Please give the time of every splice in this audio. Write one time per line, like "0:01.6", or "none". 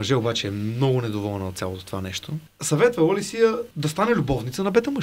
0:02.5
0:03.7